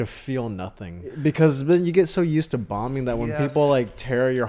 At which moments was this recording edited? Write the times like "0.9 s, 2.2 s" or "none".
1.1 s